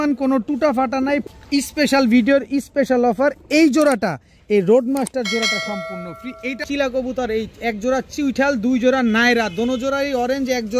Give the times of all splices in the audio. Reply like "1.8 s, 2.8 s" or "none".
1.3 s, 6.6 s